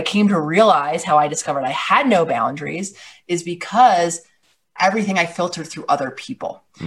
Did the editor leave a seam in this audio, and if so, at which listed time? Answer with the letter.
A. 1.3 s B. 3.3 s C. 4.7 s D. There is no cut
C